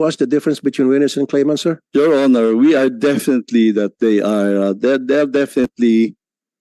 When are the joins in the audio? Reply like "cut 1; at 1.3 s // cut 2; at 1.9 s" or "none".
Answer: cut 1; at 1.8 s